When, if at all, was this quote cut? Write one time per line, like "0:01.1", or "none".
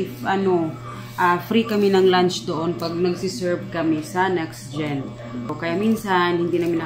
0:05.5